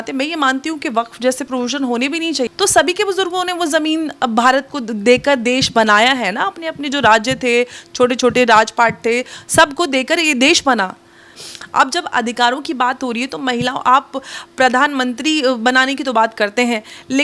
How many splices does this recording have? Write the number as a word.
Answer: two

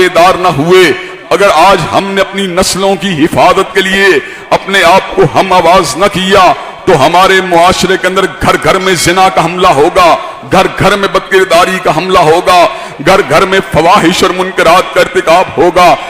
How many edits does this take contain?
zero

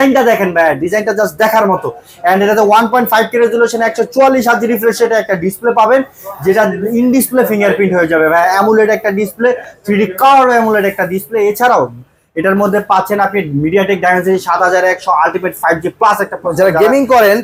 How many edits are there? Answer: zero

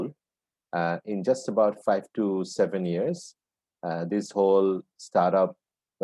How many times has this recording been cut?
zero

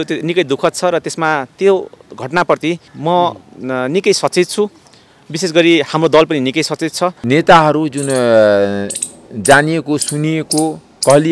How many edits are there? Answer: two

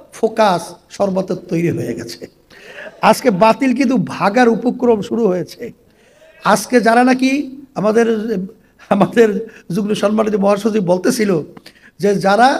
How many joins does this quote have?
zero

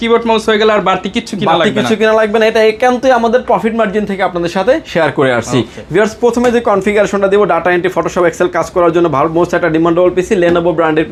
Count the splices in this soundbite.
zero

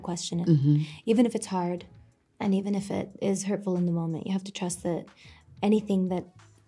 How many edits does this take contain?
zero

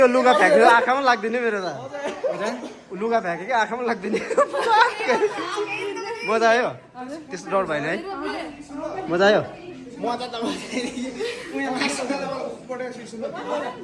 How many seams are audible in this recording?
zero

